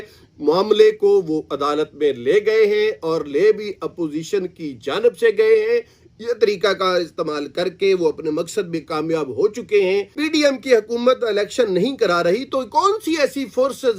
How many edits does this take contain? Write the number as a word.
one